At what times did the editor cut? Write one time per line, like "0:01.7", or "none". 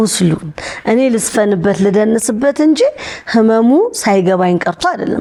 none